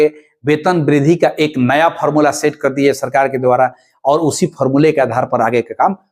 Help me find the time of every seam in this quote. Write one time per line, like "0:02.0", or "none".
none